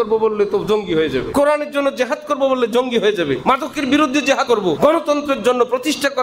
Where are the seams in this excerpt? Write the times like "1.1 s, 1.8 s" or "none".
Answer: 1.3 s, 3.4 s, 4.5 s